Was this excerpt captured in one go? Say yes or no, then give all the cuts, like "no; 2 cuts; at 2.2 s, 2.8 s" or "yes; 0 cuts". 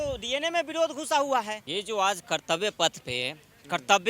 no; 1 cut; at 1.6 s